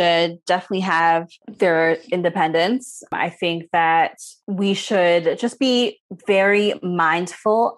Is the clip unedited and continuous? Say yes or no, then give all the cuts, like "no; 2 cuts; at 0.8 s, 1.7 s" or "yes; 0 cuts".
no; 1 cut; at 1.4 s